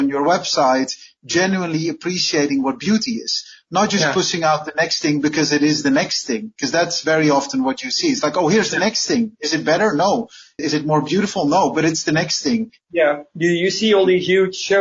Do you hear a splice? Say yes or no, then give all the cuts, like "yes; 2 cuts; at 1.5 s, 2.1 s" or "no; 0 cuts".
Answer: yes; 1 cut; at 12.8 s